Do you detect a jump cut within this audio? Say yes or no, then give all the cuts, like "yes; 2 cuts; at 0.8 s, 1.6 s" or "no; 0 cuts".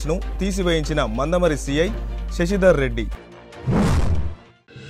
no; 0 cuts